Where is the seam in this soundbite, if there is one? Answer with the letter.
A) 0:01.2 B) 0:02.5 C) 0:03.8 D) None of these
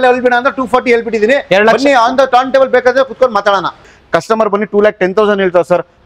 C